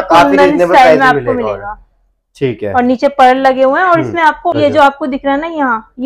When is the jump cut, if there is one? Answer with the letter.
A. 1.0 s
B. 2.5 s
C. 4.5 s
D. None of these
C